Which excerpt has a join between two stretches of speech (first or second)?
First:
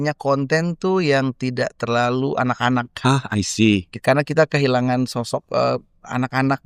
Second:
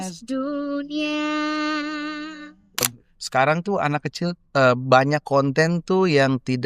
second